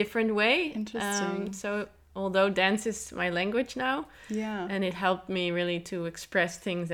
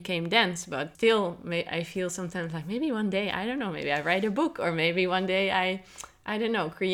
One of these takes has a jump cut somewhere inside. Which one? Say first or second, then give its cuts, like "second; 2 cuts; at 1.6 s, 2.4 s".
second; 1 cut; at 0.9 s